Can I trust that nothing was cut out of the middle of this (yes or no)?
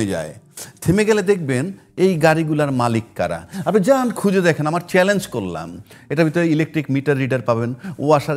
yes